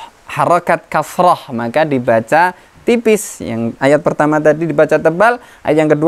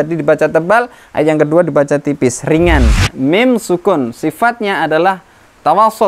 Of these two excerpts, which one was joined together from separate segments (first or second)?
second